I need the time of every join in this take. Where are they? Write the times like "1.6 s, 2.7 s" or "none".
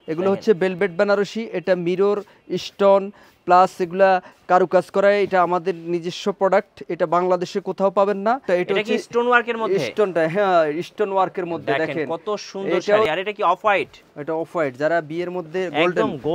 8.4 s, 13.1 s